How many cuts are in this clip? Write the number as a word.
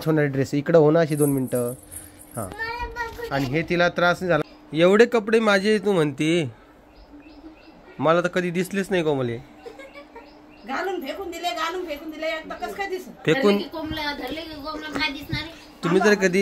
one